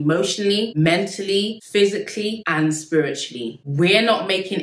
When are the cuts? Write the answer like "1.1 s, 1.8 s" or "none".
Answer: 1.6 s, 3.5 s